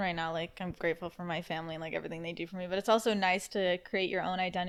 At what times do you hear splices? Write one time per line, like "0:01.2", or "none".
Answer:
none